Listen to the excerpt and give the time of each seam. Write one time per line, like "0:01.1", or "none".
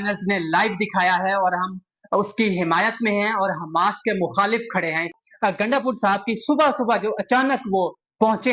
0:05.1